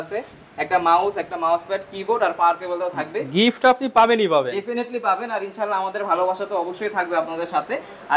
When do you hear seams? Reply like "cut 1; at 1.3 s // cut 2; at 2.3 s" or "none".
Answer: none